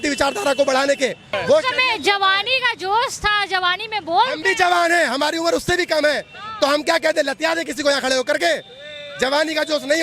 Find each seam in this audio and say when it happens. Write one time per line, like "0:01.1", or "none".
0:01.3